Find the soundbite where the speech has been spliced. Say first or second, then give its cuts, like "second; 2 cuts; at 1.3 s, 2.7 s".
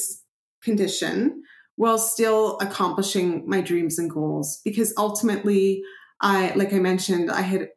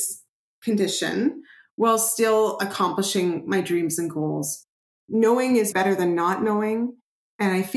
second; 2 cuts; at 4.6 s, 5.7 s